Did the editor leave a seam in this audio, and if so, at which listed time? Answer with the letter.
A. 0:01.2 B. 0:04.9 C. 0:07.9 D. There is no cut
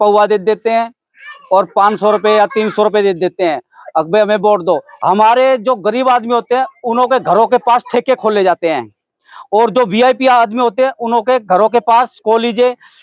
B